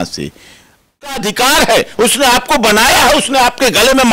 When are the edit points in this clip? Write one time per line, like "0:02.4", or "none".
0:01.0